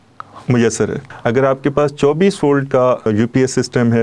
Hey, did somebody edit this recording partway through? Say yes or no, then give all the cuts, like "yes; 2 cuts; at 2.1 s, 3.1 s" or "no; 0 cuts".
yes; 2 cuts; at 1.1 s, 3.1 s